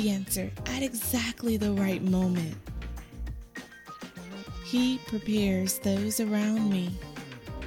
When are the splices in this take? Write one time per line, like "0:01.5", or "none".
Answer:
0:02.5
0:04.4